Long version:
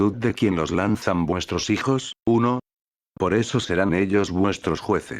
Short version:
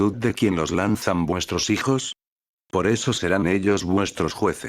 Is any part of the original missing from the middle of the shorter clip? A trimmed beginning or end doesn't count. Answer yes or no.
yes